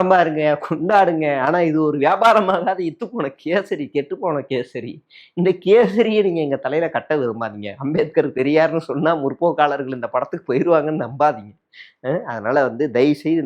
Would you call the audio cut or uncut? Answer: uncut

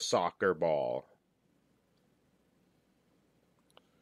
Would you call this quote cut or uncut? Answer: cut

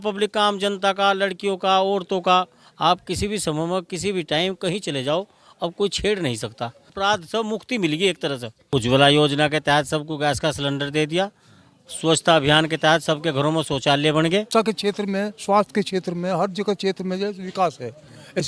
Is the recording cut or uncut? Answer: cut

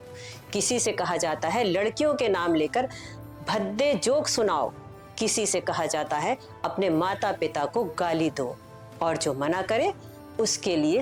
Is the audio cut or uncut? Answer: uncut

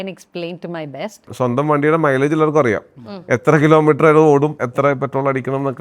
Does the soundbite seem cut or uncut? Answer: cut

